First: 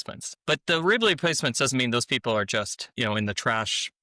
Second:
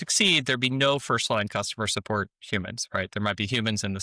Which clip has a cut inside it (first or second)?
first